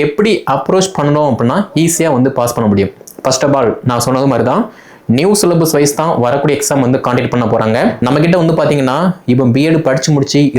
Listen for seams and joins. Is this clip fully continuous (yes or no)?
no